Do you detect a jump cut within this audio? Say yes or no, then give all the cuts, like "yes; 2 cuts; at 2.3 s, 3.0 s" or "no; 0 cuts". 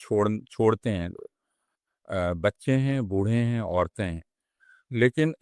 no; 0 cuts